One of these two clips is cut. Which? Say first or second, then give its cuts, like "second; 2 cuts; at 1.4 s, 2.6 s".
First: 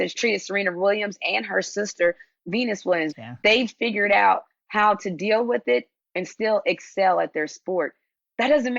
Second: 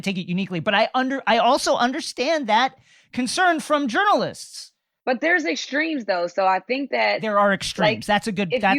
first; 1 cut; at 3.1 s